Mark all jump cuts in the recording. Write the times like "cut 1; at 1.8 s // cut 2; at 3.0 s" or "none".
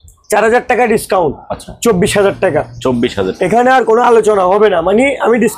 none